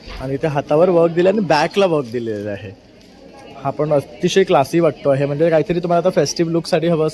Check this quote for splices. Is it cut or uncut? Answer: uncut